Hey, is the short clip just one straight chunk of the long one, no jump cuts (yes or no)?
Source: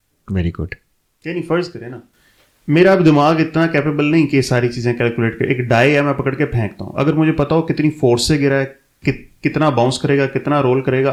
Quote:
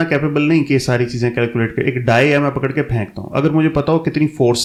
yes